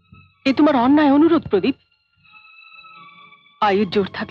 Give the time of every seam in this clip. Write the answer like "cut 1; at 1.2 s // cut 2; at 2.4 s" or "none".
none

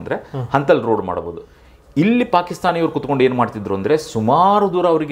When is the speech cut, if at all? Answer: none

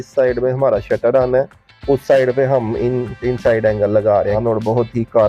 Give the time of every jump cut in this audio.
cut 1; at 4.4 s

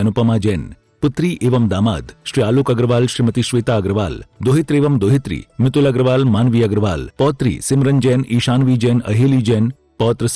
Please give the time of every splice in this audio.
cut 1; at 7.0 s

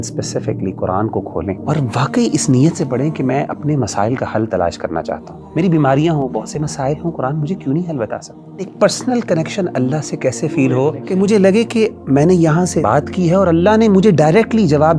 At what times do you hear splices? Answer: cut 1; at 1.6 s // cut 2; at 5.3 s // cut 3; at 8.7 s // cut 4; at 11.0 s // cut 5; at 12.8 s

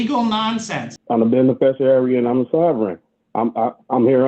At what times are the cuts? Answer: cut 1; at 0.9 s

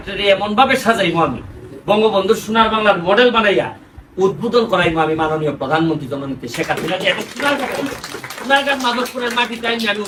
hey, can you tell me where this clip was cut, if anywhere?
none

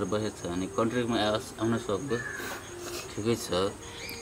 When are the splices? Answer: none

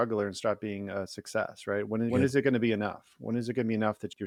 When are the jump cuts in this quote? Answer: none

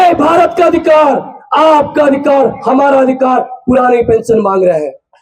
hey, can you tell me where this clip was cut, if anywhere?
none

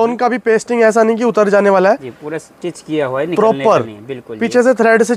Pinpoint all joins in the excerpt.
none

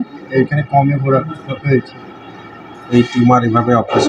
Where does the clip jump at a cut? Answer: cut 1; at 2.9 s

